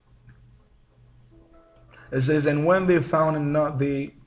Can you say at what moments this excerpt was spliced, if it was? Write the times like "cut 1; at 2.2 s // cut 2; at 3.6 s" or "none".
none